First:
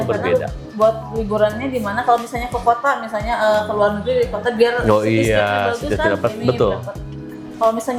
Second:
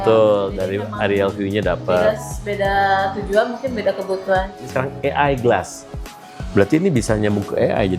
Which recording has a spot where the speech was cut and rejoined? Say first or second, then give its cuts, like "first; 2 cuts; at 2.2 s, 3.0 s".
second; 1 cut; at 4.6 s